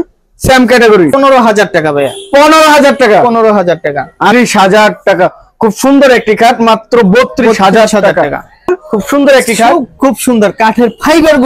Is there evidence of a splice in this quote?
yes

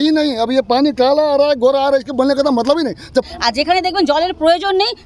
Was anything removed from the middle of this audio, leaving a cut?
yes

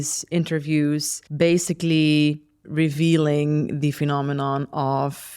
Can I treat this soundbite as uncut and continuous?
no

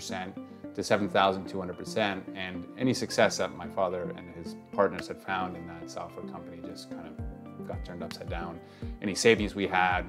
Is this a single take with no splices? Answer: yes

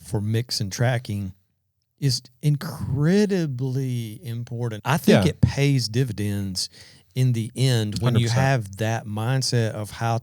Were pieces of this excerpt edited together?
yes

